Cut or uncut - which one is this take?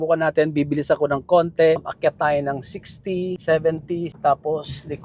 cut